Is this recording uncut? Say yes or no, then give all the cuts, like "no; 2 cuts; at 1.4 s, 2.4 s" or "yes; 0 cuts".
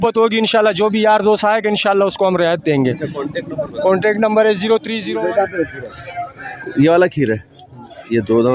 no; 1 cut; at 5.0 s